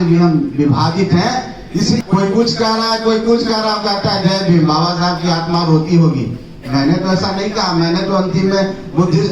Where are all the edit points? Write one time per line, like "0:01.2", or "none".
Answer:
0:02.0

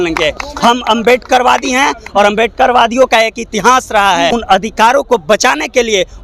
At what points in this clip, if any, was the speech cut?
0:04.3

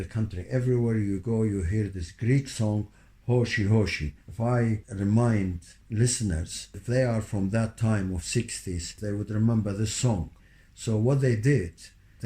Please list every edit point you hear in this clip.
0:04.7

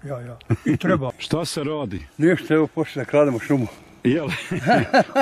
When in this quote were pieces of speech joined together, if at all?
0:01.2

